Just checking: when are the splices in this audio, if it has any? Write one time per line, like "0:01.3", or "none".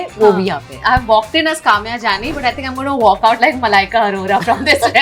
none

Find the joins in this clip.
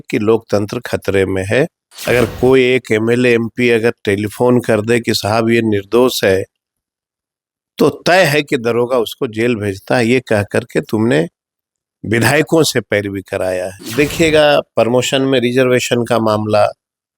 0:01.9
0:13.8

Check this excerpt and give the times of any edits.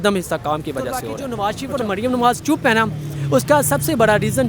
0:01.2

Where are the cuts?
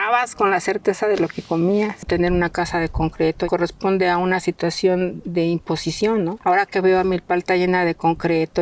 0:02.1
0:03.4
0:06.4

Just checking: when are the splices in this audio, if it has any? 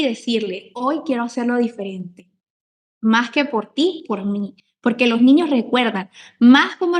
none

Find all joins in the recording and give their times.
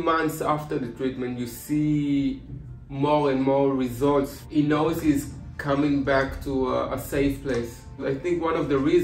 0:04.4
0:08.0

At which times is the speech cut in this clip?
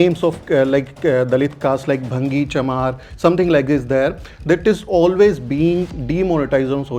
none

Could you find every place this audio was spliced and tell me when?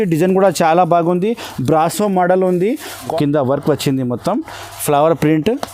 0:03.0

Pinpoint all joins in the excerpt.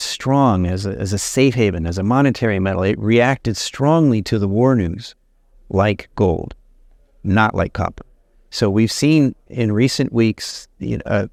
none

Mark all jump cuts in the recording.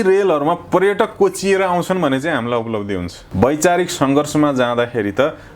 0:03.2

